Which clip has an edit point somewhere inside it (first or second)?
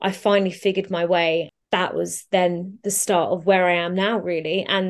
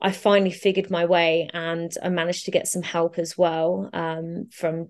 first